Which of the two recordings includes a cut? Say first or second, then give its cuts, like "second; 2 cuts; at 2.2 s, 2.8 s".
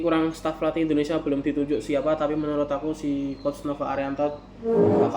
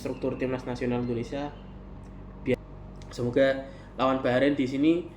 second; 1 cut; at 2.5 s